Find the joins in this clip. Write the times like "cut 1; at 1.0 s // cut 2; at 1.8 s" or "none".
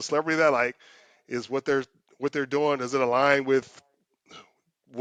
none